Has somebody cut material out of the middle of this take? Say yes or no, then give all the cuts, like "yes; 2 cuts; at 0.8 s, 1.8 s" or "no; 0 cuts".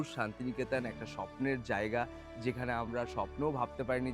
no; 0 cuts